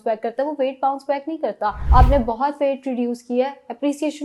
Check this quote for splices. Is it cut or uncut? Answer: cut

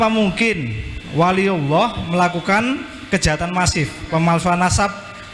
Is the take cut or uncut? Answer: uncut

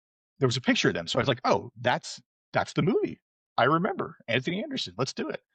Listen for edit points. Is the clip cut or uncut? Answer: uncut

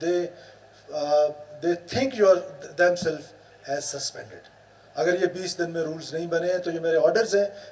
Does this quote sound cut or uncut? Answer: uncut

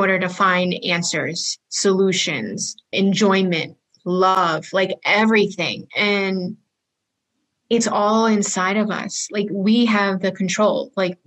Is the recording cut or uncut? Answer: cut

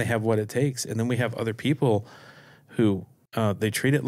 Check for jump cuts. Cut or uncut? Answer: cut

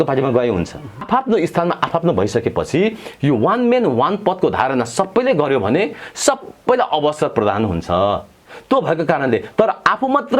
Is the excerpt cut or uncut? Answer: cut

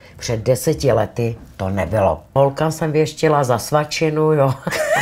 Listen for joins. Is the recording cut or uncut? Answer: cut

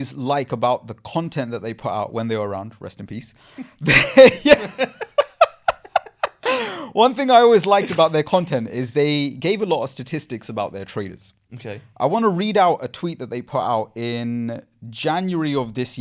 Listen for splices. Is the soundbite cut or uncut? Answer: uncut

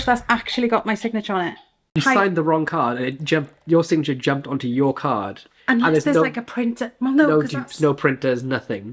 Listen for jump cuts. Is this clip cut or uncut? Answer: cut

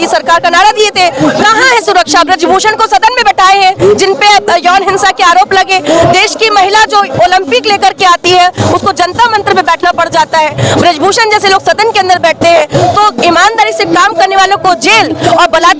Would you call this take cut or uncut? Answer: uncut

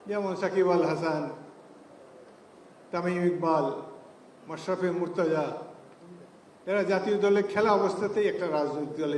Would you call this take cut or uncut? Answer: uncut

